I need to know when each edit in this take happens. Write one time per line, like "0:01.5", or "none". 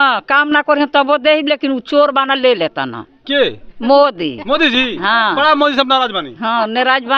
none